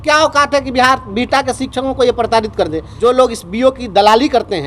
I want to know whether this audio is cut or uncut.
cut